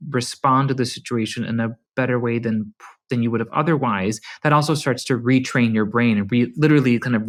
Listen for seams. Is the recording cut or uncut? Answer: uncut